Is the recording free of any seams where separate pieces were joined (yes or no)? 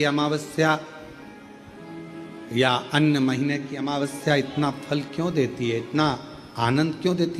yes